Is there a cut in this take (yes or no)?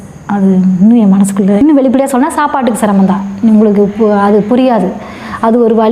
yes